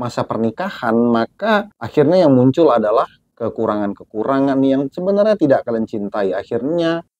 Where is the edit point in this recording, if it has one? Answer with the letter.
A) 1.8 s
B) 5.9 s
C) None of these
A